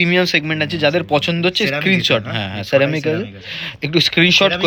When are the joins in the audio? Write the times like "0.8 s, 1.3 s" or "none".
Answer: none